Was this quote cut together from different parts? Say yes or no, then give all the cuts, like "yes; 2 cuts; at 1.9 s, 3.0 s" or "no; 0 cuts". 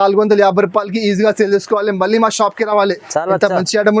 no; 0 cuts